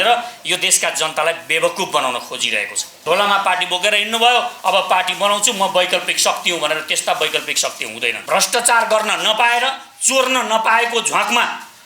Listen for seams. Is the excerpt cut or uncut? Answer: cut